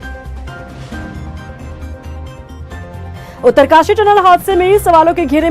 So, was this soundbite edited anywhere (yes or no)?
yes